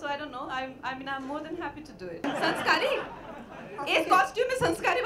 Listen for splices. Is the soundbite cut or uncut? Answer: cut